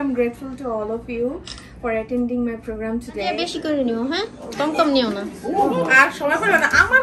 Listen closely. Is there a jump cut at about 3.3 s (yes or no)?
yes